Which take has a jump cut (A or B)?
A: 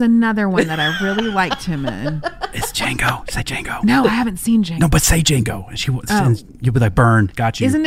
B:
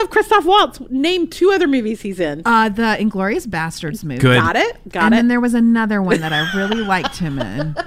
A